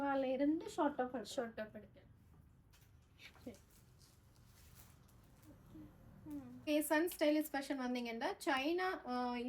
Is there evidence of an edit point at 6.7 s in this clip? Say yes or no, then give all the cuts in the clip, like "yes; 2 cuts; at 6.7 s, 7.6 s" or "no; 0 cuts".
yes; 1 cut; at 6.7 s